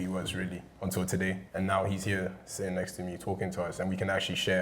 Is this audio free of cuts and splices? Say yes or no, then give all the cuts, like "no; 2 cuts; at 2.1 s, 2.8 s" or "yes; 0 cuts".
no; 1 cut; at 1.4 s